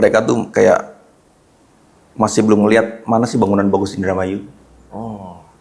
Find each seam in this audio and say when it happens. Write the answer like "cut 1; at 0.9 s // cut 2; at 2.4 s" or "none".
none